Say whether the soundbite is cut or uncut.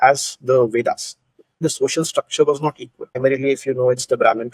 cut